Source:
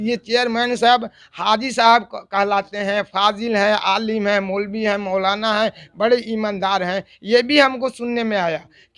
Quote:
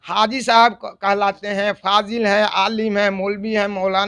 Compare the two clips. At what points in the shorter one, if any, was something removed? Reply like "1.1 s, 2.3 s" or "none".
none

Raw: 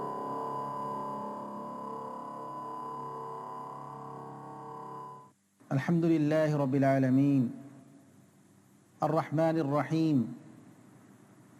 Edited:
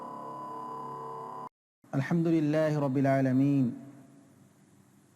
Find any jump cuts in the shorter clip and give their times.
1.5 s

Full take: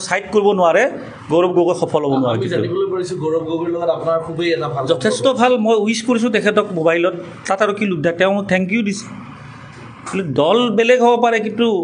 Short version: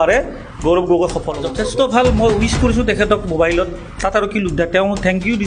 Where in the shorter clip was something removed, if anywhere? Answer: 1.3 s

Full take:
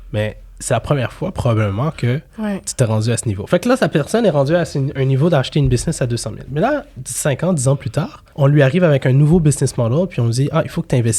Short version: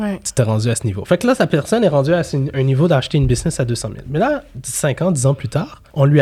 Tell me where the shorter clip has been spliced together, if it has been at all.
none

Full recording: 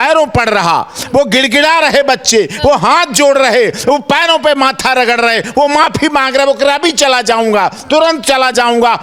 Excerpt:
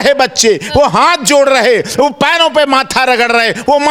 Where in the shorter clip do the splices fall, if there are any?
none

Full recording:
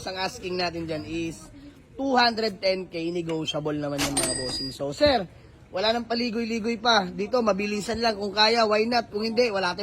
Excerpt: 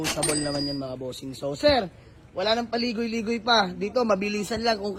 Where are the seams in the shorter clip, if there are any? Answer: none

